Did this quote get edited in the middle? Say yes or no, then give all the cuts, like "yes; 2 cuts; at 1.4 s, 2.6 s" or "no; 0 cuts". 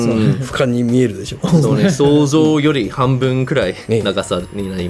no; 0 cuts